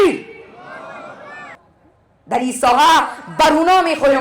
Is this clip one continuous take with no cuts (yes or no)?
no